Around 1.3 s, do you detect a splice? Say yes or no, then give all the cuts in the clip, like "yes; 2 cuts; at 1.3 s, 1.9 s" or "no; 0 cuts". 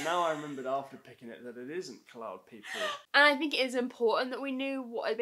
no; 1 cut; at 3.0 s